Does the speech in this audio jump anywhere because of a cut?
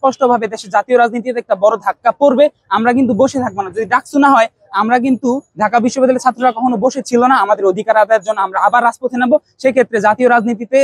no; 0 cuts

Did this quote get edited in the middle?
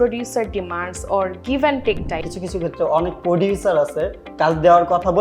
yes; 1 cut; at 2.3 s

